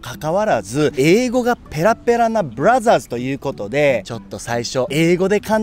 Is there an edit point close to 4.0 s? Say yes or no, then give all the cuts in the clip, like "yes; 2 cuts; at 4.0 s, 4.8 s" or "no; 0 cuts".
no; 0 cuts